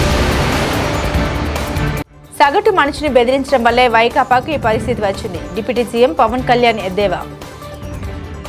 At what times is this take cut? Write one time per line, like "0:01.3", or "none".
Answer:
0:02.2